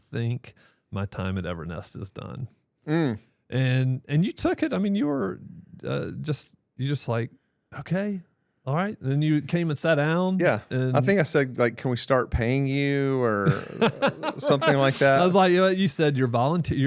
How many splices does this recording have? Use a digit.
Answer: 0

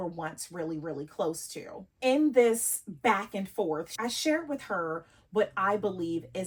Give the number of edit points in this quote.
0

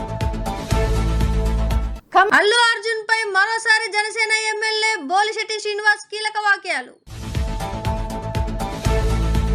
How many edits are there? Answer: 1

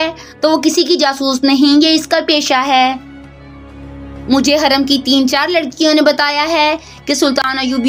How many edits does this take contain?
0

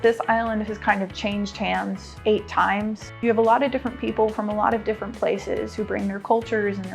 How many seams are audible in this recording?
2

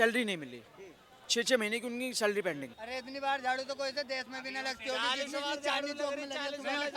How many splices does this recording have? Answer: 1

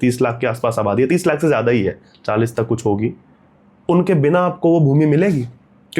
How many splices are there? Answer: 0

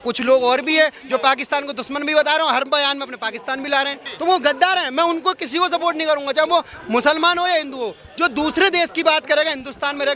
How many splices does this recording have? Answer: 1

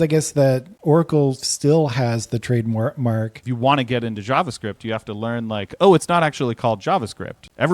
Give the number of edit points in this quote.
1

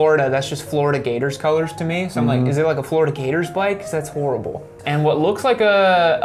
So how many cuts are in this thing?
1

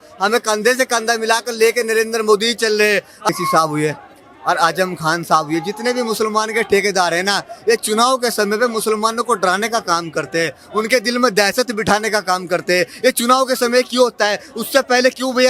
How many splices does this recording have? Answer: 1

